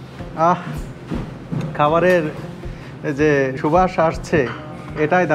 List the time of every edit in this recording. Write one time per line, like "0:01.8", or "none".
0:03.6